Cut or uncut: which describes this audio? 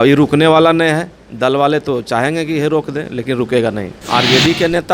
cut